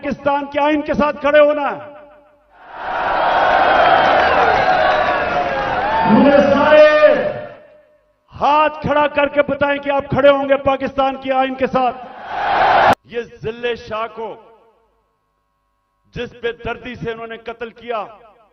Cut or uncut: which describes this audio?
cut